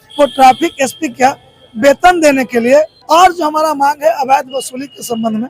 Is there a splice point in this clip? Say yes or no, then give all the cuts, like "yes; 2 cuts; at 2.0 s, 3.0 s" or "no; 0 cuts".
yes; 1 cut; at 3.0 s